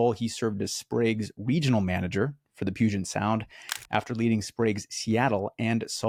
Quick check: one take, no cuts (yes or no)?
yes